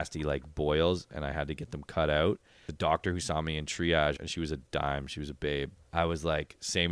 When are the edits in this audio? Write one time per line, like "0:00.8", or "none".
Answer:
0:02.6
0:04.2
0:05.8

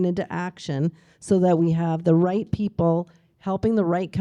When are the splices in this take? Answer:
none

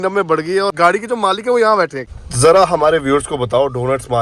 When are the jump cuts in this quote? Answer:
0:02.1

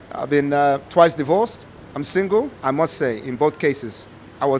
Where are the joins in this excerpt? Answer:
0:02.5

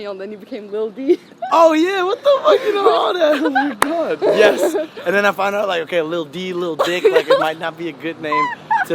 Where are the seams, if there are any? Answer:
none

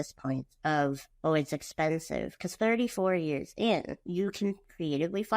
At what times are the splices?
0:01.1
0:04.0

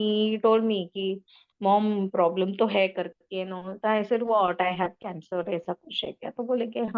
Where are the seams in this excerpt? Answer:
none

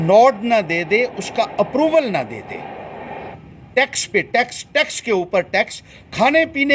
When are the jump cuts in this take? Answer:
0:03.3

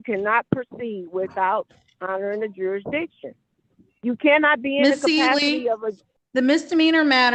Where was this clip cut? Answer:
none

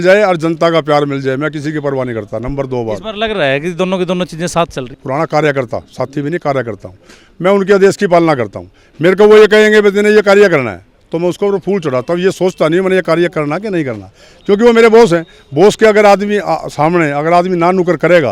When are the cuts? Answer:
0:04.9

